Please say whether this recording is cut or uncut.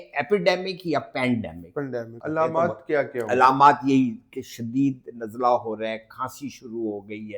cut